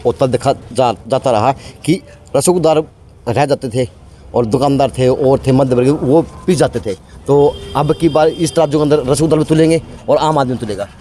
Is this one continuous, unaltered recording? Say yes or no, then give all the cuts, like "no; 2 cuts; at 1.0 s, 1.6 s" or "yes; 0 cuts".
yes; 0 cuts